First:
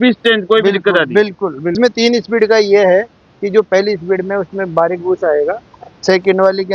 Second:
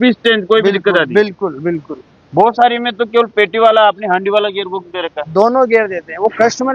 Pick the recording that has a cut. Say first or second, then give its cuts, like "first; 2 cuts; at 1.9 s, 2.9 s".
first; 1 cut; at 1.7 s